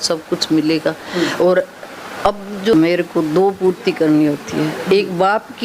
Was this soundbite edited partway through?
yes; 1 cut; at 2.7 s

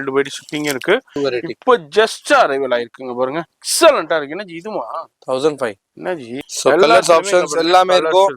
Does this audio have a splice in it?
yes; 2 cuts; at 1.1 s, 6.4 s

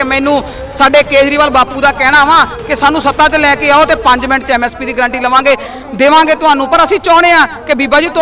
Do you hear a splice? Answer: no; 0 cuts

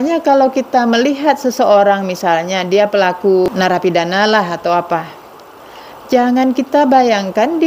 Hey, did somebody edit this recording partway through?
yes; 1 cut; at 3.5 s

